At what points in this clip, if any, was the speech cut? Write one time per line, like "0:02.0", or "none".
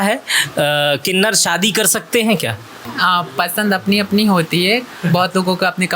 0:02.9